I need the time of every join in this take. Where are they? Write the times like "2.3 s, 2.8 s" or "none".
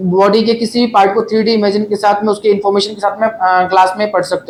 none